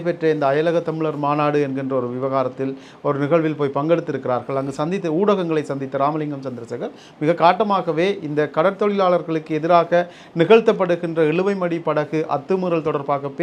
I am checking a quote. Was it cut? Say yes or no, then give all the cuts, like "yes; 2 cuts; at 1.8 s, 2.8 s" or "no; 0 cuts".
no; 0 cuts